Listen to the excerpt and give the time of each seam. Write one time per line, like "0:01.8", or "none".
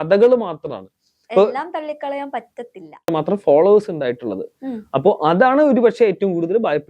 0:03.1